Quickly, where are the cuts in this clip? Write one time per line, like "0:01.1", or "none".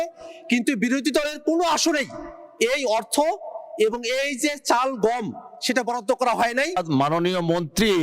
0:06.8